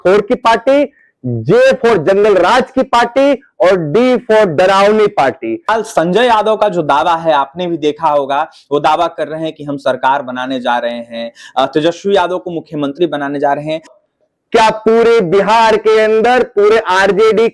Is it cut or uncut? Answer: cut